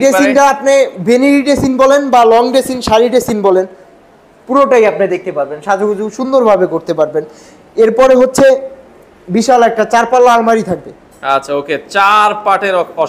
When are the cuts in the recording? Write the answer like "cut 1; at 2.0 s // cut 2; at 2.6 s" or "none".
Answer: none